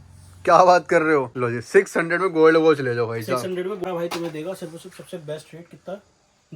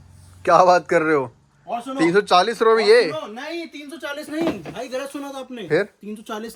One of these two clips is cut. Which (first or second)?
first